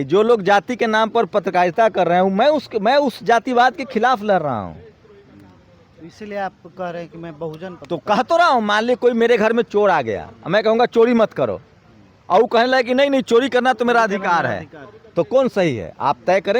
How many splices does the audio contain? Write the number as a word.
zero